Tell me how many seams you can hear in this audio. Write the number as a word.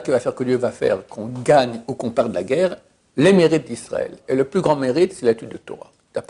zero